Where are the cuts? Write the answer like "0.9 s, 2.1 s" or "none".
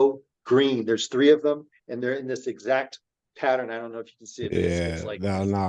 none